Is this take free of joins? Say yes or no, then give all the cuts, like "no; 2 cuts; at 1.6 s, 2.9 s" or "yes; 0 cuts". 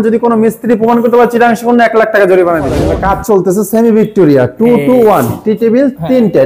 no; 1 cut; at 2.8 s